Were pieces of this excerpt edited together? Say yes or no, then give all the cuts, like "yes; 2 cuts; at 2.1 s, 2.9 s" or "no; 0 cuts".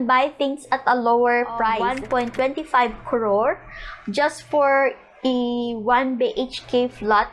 yes; 1 cut; at 1.8 s